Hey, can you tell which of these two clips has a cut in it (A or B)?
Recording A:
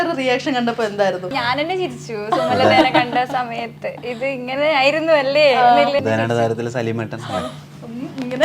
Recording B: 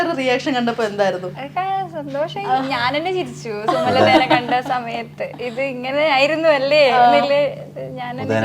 A